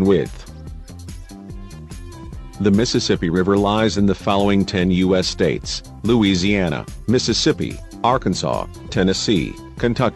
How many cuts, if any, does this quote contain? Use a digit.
1